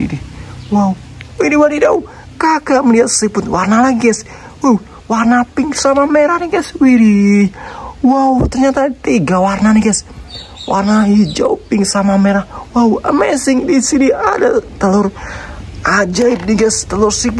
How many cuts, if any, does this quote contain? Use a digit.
0